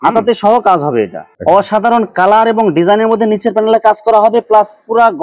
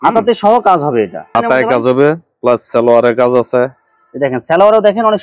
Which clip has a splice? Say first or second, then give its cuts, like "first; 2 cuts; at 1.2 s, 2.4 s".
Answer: first; 1 cut; at 1.2 s